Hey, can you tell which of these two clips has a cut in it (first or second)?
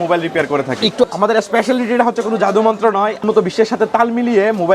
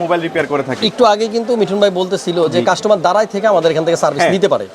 first